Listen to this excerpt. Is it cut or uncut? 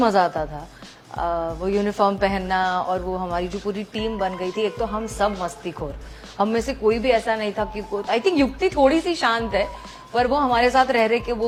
uncut